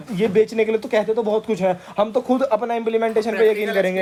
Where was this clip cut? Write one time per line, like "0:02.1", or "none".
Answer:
none